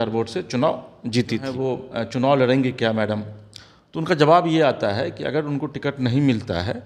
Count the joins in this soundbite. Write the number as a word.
one